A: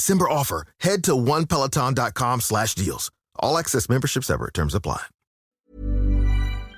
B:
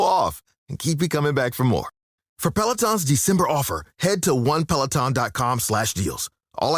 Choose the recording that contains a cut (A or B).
A